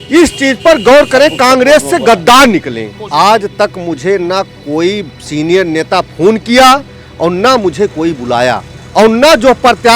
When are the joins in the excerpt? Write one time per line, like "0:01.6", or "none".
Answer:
0:03.0
0:08.7